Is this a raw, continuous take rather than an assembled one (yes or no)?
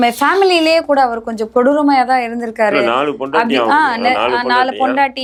yes